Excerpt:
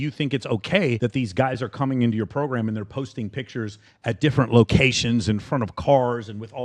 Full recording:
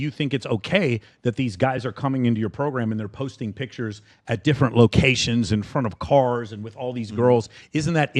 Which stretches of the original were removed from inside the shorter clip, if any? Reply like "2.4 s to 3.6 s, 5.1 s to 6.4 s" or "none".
1.0 s to 1.2 s